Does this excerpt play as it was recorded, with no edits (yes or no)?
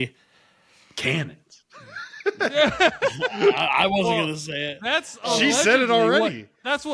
yes